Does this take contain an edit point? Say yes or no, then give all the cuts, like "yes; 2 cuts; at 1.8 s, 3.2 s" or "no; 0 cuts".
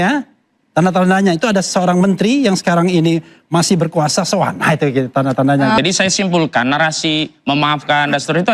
yes; 1 cut; at 5.8 s